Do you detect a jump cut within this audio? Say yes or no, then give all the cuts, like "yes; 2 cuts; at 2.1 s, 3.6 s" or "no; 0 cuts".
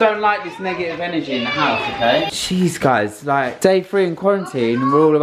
yes; 1 cut; at 2.3 s